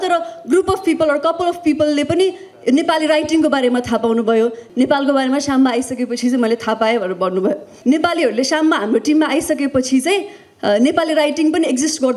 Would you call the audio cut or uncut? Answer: cut